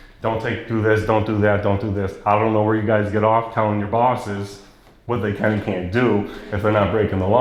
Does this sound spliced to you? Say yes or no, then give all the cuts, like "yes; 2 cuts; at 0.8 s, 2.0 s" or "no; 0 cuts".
no; 0 cuts